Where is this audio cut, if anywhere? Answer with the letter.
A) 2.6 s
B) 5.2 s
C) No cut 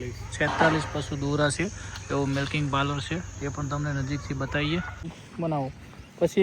B